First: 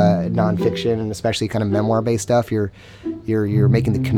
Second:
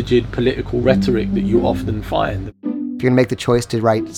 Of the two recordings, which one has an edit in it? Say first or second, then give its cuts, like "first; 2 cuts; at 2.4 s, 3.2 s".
second; 1 cut; at 2.6 s